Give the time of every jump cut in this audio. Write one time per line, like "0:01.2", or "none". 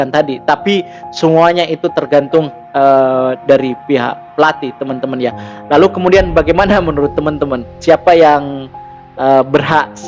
none